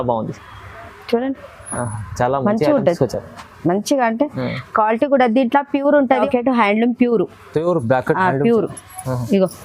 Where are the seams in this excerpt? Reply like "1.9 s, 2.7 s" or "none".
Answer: 6.2 s